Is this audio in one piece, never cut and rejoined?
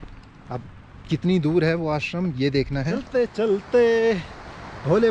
no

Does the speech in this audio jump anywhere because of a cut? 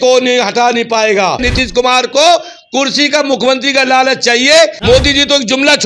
yes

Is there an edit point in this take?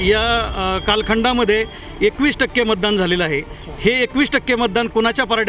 no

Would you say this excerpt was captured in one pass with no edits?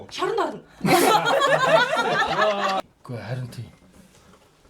no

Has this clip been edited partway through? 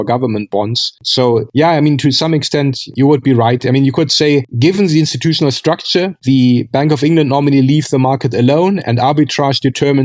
no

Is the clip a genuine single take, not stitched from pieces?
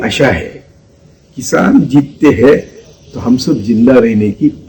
yes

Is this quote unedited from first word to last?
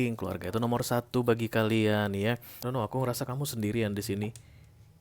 no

